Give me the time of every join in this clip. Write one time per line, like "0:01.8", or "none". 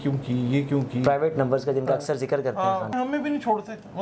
0:02.9